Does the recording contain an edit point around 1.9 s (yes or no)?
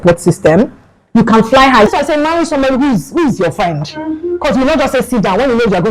yes